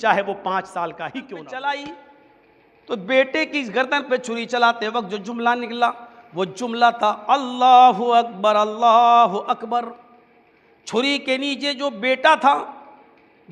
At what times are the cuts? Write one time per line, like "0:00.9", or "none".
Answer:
0:01.4

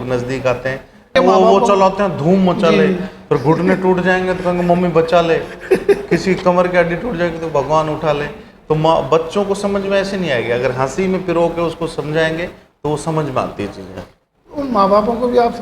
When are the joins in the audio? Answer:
0:01.1

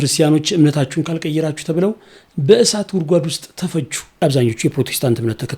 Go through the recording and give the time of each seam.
0:04.2

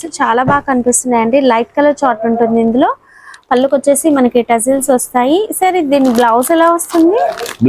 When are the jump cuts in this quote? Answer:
none

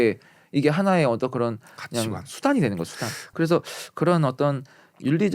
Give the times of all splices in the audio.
0:03.2

